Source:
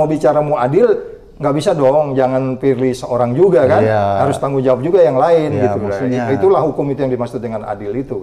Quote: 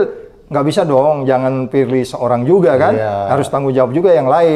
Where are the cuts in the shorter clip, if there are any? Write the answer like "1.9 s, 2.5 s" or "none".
none